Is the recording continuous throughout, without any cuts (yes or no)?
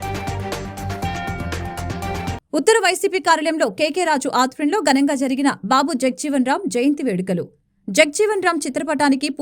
no